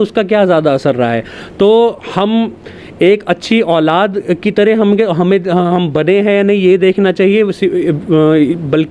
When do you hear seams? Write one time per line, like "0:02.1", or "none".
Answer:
none